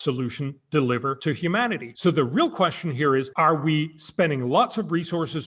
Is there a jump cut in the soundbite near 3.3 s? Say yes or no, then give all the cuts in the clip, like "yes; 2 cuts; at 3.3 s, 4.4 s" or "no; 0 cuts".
yes; 2 cuts; at 1.5 s, 3.3 s